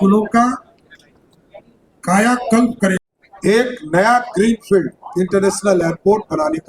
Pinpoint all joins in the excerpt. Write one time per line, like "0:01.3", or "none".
0:03.0